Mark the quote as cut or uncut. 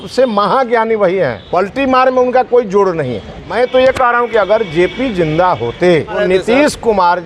cut